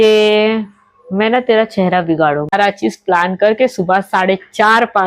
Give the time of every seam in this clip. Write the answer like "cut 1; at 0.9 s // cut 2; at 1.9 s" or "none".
cut 1; at 2.5 s